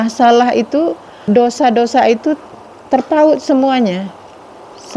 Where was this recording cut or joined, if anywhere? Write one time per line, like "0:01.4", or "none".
0:01.1

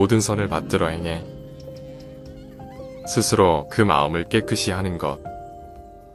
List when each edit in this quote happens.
none

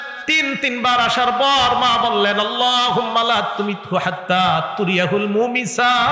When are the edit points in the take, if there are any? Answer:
none

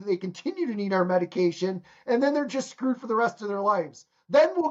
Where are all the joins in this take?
none

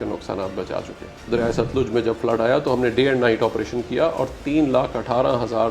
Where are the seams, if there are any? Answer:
0:01.1

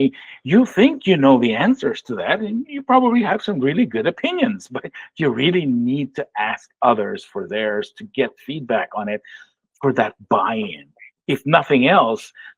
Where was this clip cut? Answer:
none

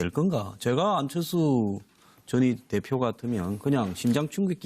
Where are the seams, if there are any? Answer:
none

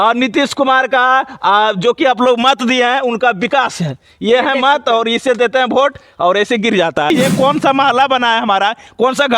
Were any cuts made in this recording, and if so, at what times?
0:07.1

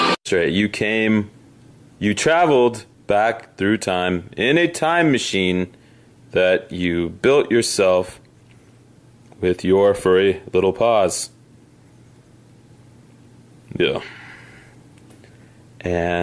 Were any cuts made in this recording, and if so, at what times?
0:11.1

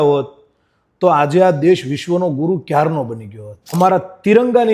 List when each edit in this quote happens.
0:03.8

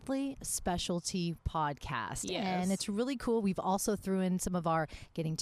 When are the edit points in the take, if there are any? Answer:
none

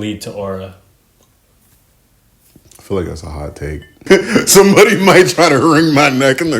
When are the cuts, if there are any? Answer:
0:04.0

